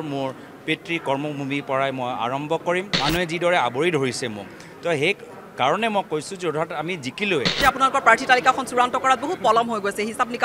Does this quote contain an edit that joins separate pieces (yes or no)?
yes